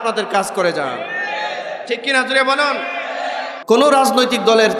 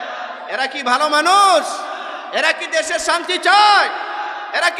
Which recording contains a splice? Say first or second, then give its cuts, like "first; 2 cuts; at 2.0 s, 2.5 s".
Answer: first; 1 cut; at 3.5 s